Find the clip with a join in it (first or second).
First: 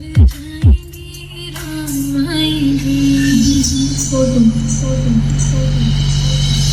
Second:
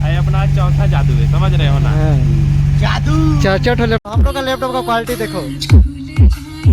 second